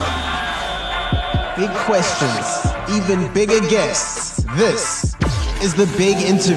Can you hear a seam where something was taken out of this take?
no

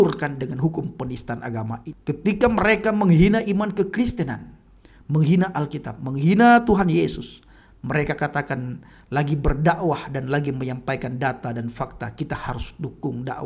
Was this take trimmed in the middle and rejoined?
yes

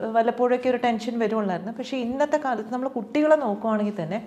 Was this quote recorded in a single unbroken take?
yes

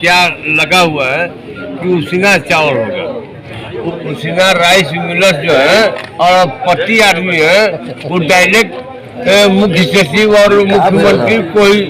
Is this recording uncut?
no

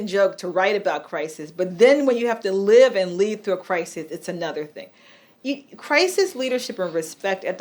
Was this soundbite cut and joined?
no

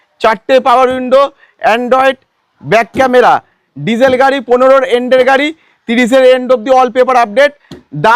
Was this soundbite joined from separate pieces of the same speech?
no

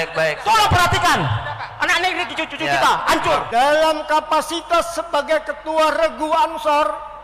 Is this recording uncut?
no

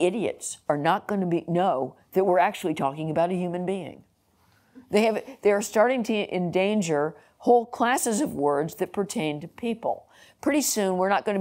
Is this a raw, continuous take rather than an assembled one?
yes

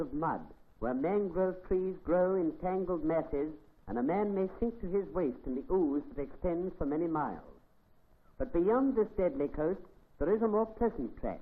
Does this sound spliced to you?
yes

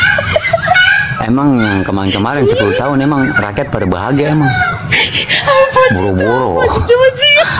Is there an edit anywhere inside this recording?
no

